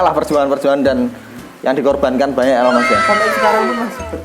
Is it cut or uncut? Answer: uncut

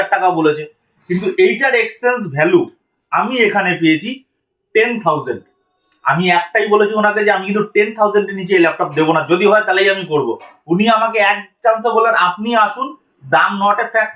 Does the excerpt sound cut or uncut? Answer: uncut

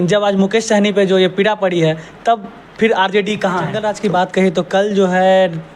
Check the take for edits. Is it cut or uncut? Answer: cut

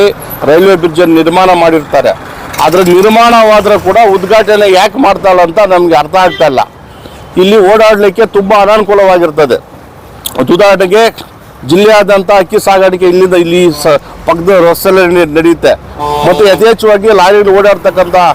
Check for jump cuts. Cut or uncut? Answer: uncut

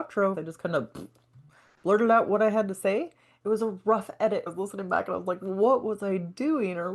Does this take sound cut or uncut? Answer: cut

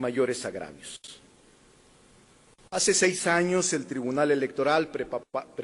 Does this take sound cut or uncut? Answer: cut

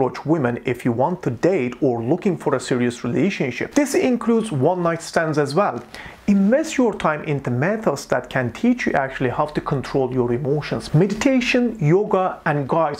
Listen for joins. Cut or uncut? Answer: uncut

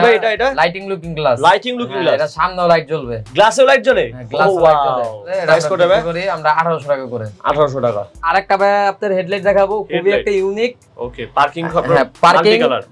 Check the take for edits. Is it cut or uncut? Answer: uncut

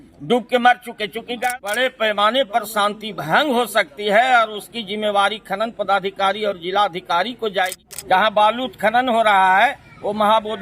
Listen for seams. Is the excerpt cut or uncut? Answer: cut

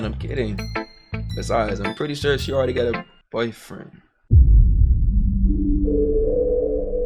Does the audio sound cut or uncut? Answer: cut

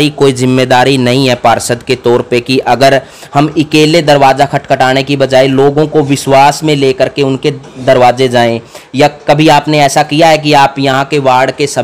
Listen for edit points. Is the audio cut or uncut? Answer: uncut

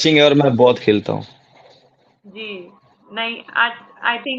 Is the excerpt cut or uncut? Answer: uncut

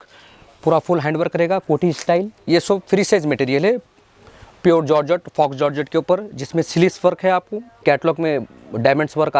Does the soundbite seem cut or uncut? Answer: cut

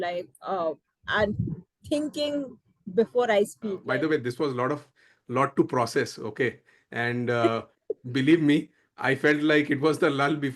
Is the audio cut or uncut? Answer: cut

